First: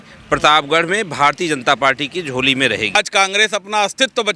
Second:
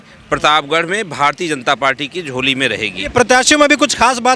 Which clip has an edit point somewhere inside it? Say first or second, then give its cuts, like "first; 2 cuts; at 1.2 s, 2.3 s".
first; 1 cut; at 3.0 s